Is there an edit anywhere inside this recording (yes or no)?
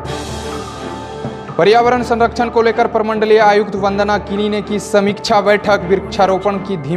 yes